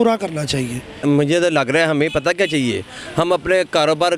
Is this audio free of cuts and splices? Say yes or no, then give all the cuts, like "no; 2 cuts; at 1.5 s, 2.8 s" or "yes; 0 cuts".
no; 1 cut; at 1.0 s